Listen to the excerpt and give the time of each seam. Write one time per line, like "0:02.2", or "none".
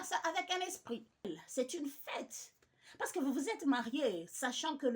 0:01.2